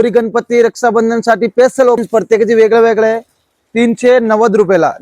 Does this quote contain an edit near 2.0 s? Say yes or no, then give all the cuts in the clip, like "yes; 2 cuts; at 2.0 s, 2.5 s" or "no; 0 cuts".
yes; 1 cut; at 2.0 s